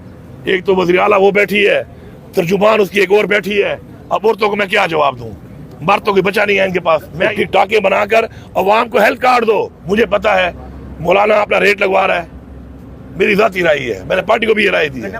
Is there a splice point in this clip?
yes; 2 cuts; at 7.3 s, 9.8 s

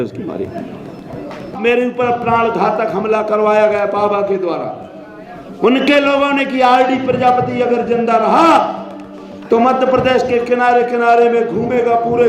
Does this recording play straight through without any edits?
no; 1 cut; at 1.6 s

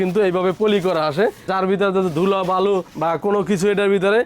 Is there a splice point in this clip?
no; 0 cuts

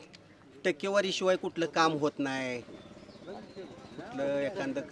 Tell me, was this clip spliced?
no; 0 cuts

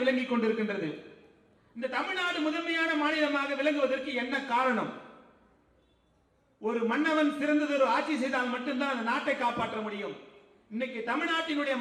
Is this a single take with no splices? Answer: yes; 0 cuts

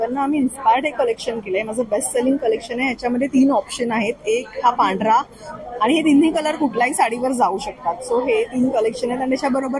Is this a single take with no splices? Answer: yes; 0 cuts

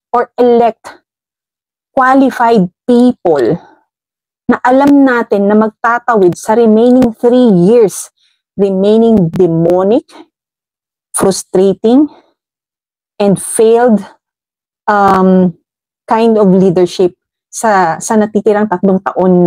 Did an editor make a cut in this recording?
no; 0 cuts

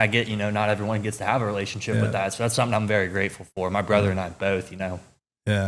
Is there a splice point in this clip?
no; 0 cuts

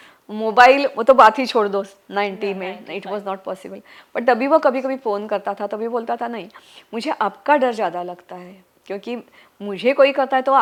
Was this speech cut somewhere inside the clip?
no; 0 cuts

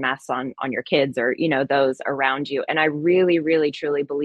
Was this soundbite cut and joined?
no; 0 cuts

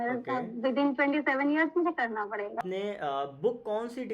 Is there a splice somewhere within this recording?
yes; 1 cut; at 2.6 s

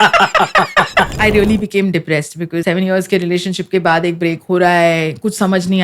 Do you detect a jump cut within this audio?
yes; 2 cuts; at 1.1 s, 2.6 s

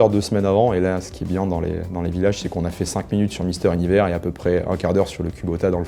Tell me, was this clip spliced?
no; 0 cuts

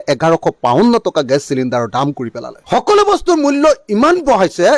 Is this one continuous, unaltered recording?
yes; 0 cuts

